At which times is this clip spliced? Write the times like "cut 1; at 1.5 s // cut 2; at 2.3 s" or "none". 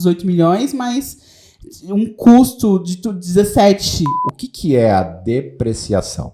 cut 1; at 4.2 s